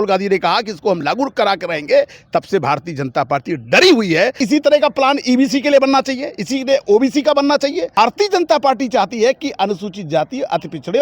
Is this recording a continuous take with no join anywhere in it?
no; 2 cuts; at 4.4 s, 8.0 s

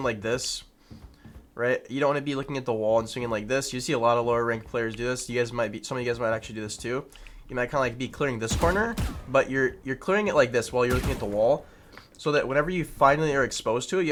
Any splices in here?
no; 0 cuts

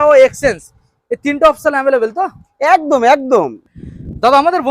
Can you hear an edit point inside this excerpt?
yes; 1 cut; at 3.6 s

